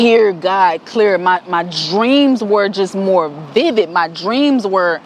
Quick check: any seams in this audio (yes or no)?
no